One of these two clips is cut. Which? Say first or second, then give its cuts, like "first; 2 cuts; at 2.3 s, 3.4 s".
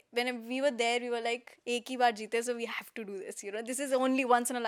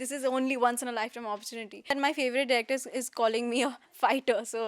second; 1 cut; at 2.0 s